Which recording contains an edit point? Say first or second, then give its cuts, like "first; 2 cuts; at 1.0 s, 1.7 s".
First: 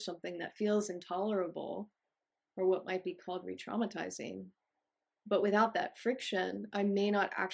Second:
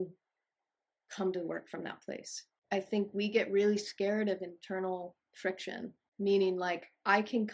second; 2 cuts; at 2.6 s, 6.0 s